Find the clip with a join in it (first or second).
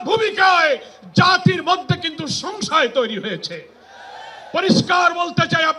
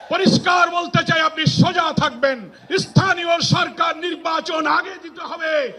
second